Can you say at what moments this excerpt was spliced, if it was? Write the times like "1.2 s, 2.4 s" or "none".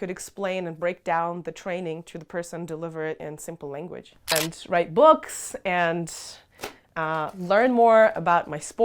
4.4 s